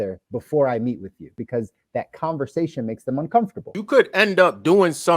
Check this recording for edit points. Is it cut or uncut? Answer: cut